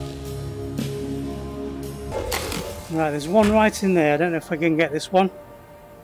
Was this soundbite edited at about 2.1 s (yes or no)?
yes